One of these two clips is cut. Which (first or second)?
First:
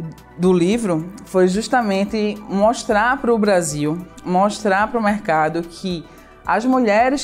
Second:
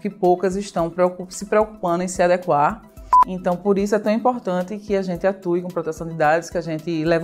second